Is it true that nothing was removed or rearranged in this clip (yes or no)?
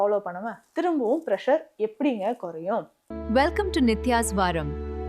no